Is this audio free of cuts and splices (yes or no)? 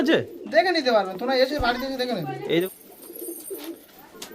no